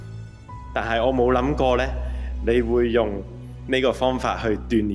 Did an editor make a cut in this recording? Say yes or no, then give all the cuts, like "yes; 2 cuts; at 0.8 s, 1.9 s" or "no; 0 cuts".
no; 0 cuts